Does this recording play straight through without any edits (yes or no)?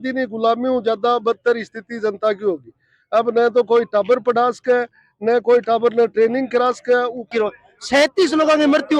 no